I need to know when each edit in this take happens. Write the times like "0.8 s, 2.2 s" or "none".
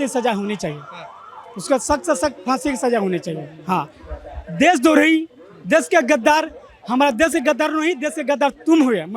none

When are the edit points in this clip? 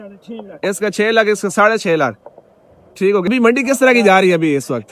3.3 s

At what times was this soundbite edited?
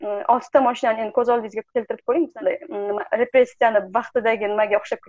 2.3 s

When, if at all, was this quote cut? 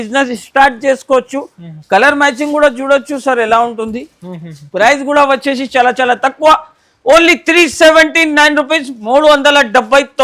none

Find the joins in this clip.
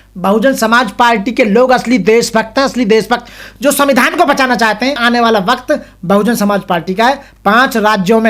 5.0 s

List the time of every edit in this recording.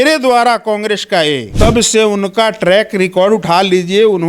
1.5 s

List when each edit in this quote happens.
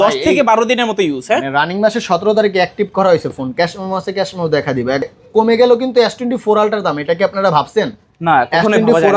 5.1 s

